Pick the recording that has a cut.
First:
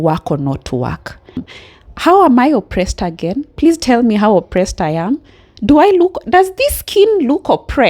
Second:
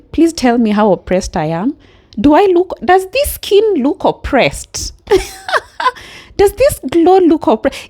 first; 1 cut; at 1.5 s

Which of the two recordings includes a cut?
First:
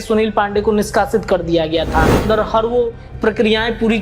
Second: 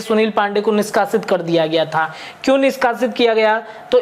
first; 1 cut; at 2.2 s

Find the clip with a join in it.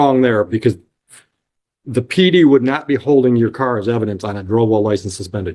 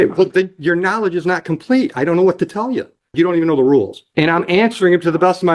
second; 2 cuts; at 3.1 s, 4.0 s

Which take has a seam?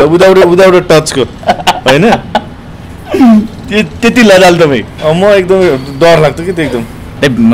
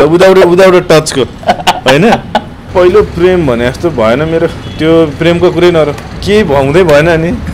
second; 2 cuts; at 2.6 s, 6.1 s

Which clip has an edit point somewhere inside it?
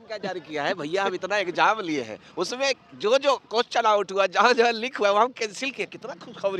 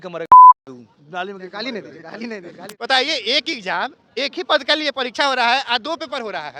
second; 1 cut; at 2.7 s

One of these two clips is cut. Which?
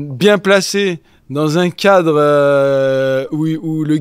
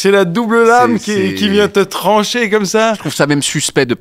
second; 1 cut; at 3.1 s

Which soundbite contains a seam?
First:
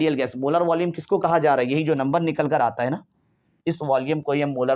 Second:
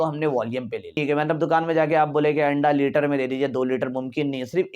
second; 1 cut; at 1.0 s

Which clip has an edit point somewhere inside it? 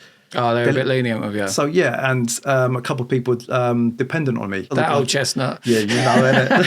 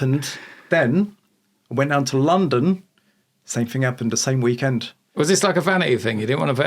first; 1 cut; at 4.7 s

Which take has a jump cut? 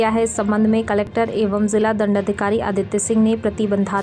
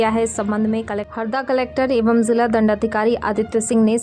second; 1 cut; at 1.0 s

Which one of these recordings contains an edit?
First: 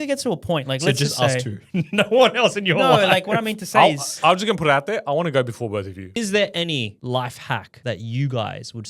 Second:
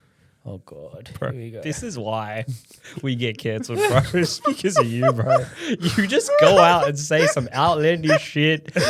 first; 3 cuts; at 6.2 s, 7.0 s, 7.7 s

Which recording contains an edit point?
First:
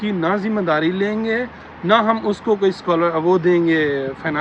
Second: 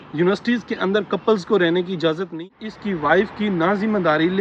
second; 1 cut; at 2.5 s

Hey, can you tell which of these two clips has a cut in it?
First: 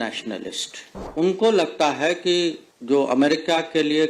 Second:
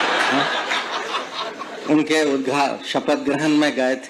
first; 2 cuts; at 1.0 s, 2.7 s

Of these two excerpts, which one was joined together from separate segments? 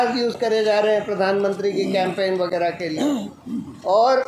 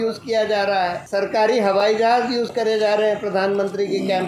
second; 1 cut; at 1.0 s

